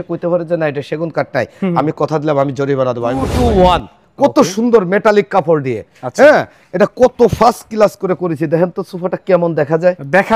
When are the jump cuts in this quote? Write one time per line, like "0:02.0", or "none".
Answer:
0:03.3